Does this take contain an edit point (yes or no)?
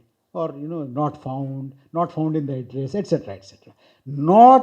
no